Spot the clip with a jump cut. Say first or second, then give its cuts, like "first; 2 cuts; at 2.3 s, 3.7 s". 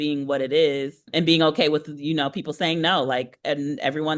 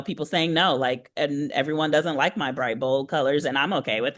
first; 1 cut; at 1.0 s